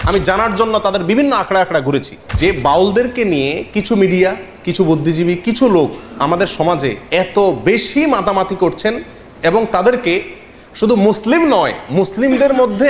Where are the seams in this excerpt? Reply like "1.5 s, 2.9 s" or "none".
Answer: 2.2 s